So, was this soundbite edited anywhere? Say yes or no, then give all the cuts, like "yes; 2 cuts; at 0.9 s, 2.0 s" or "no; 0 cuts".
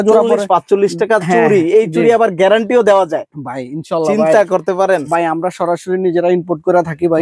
no; 0 cuts